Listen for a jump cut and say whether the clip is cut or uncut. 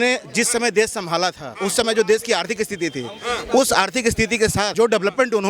cut